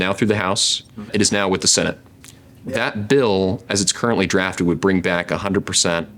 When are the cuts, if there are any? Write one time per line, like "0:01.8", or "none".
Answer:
0:01.1